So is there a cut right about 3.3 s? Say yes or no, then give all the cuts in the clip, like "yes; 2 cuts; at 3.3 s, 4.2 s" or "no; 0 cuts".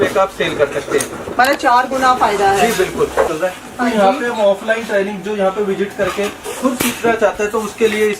yes; 1 cut; at 3.3 s